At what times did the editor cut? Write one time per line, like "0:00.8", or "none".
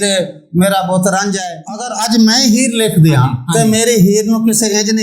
0:01.4
0:03.4